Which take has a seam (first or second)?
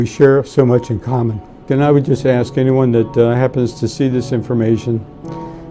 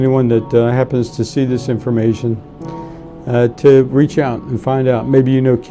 first